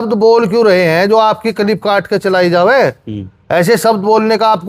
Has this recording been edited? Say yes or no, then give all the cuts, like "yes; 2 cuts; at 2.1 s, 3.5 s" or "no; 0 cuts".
no; 0 cuts